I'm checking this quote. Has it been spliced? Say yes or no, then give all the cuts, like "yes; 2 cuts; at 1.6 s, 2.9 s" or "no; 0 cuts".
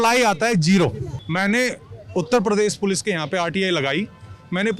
yes; 1 cut; at 1.1 s